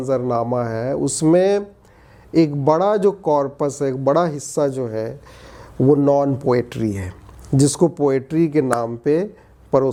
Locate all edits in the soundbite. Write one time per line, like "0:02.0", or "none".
none